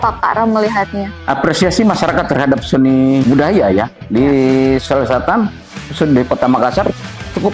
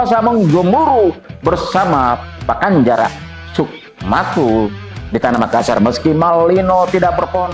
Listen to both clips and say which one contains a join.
first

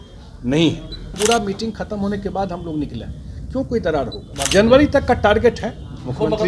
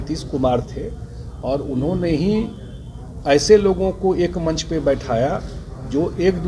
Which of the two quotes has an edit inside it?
first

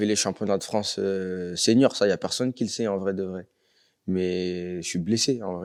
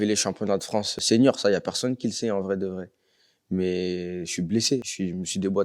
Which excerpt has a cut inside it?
second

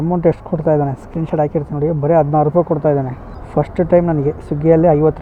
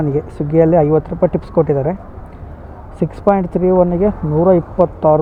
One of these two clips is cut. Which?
first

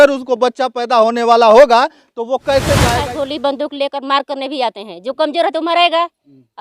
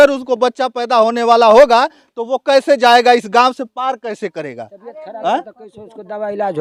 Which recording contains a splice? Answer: first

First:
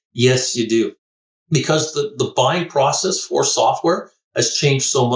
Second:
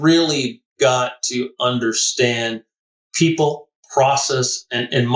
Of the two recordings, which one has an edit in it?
first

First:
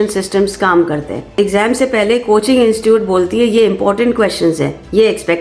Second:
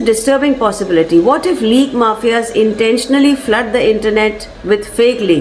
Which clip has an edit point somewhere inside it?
first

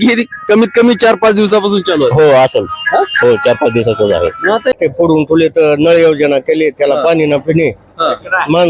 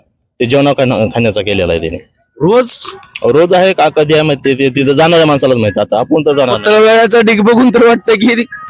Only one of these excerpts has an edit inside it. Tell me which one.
first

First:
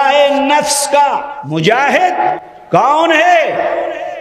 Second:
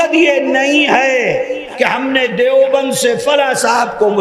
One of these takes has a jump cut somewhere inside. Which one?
first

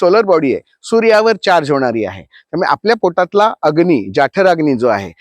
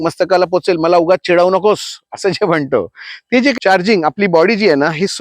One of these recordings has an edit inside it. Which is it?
second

